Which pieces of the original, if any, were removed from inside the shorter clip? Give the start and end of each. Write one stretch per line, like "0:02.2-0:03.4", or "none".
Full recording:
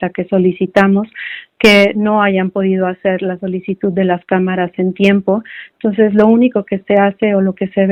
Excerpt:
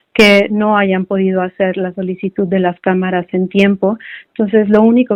none